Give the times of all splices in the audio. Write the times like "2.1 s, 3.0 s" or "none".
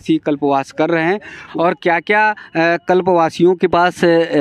1.4 s